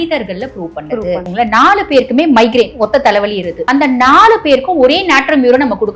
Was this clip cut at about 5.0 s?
no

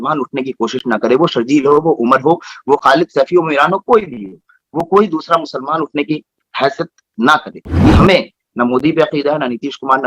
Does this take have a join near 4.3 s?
no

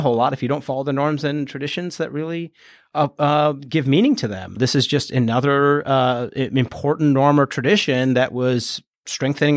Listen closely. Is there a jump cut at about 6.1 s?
no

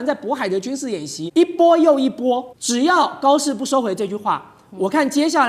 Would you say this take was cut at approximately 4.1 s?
no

